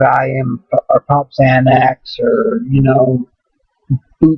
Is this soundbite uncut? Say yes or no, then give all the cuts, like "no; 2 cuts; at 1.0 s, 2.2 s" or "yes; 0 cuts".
no; 1 cut; at 2.0 s